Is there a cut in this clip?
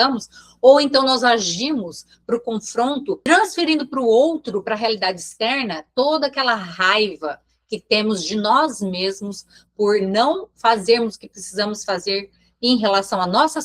no; 0 cuts

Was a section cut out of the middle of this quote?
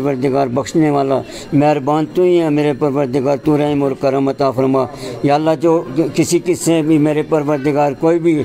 no; 0 cuts

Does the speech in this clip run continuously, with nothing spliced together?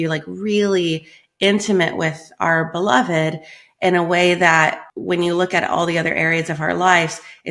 no; 1 cut; at 4.9 s

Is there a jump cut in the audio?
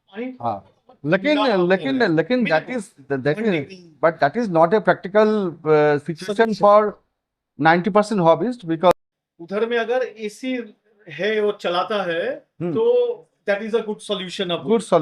yes; 2 cuts; at 5.2 s, 8.9 s

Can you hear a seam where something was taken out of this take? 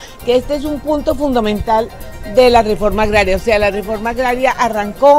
no; 0 cuts

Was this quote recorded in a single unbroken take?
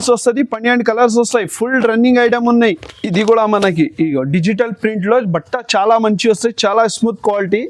no; 1 cut; at 2.8 s

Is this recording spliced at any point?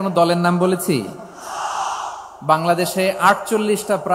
no; 0 cuts

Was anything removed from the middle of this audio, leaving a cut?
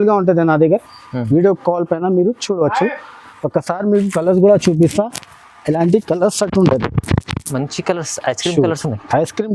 no; 0 cuts

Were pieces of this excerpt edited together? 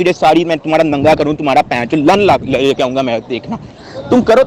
no; 0 cuts

